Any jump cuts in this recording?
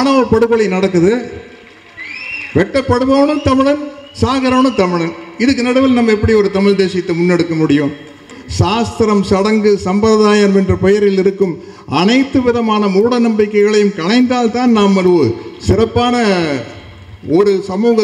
yes; 1 cut; at 8.4 s

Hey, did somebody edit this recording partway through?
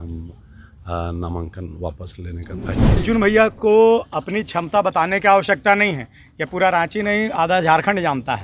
yes; 1 cut; at 2.8 s

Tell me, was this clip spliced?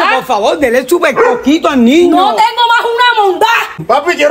no; 0 cuts

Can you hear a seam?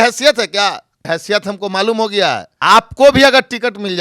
yes; 2 cuts; at 0.9 s, 2.5 s

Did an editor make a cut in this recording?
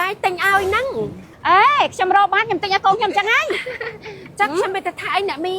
yes; 1 cut; at 1.3 s

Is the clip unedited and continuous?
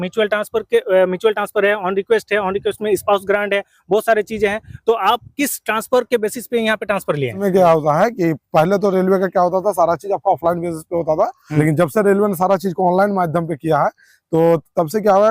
no; 2 cuts; at 7.4 s, 11.4 s

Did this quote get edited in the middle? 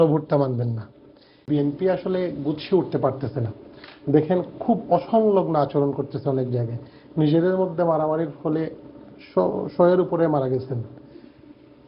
yes; 1 cut; at 1.3 s

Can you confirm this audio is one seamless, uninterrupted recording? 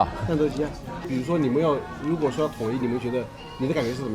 no; 1 cut; at 1.1 s

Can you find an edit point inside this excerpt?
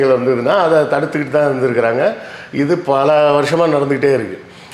no; 0 cuts

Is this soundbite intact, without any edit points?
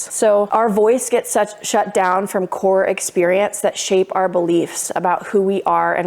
yes; 0 cuts

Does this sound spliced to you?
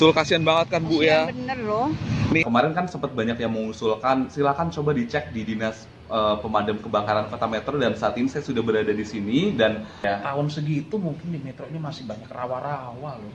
yes; 2 cuts; at 2.5 s, 10.0 s

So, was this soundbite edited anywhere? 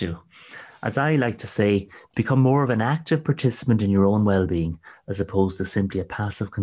no; 0 cuts

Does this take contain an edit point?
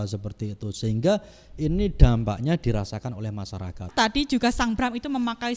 yes; 1 cut; at 3.9 s

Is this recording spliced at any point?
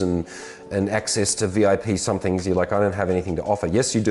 no; 0 cuts

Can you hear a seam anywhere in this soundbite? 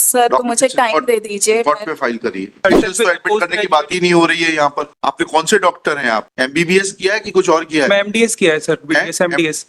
yes; 1 cut; at 2.6 s

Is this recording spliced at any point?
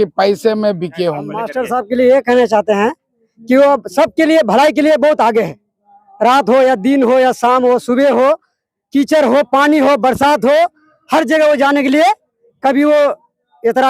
yes; 1 cut; at 1.5 s

